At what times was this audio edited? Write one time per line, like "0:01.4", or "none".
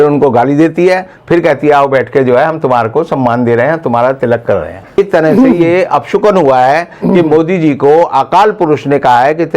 0:05.0